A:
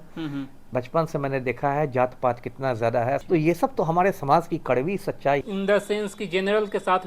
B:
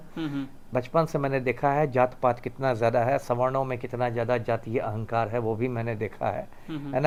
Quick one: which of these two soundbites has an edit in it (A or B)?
A